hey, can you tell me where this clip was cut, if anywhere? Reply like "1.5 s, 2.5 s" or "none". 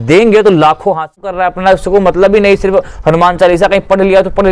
1.3 s

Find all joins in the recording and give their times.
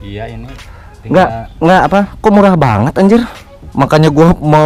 none

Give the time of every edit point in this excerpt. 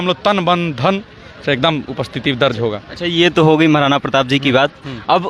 none

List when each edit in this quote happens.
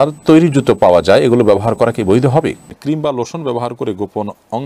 2.7 s

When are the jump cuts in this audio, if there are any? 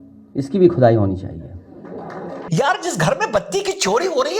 2.4 s

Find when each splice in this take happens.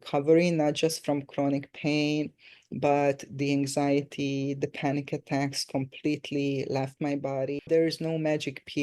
7.6 s

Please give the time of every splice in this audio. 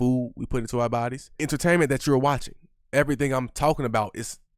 1.2 s, 2.8 s

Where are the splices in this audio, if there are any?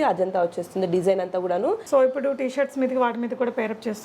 1.8 s

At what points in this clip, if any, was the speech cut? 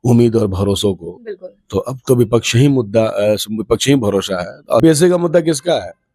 4.8 s

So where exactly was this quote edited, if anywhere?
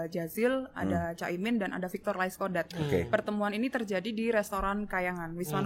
none

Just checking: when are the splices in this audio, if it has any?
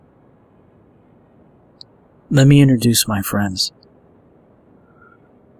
1.4 s

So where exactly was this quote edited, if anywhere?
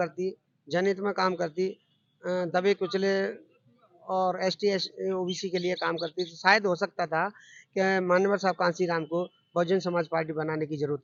none

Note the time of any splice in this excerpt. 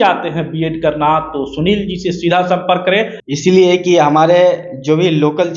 3.2 s

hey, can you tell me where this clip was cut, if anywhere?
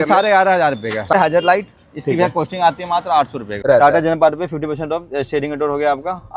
1.1 s, 3.5 s

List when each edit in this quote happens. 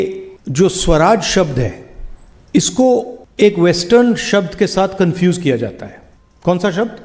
none

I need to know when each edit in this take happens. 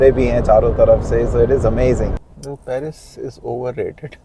2.2 s

